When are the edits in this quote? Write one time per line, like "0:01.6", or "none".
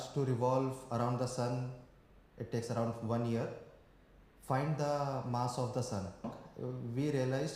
0:06.4